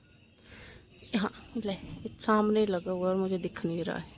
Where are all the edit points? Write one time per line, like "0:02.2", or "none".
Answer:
none